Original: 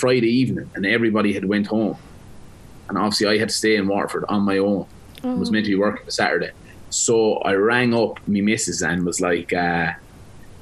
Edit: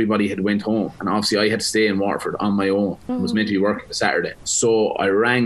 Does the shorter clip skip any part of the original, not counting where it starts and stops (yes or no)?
yes